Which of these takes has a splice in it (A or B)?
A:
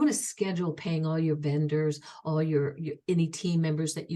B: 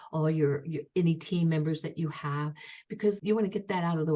B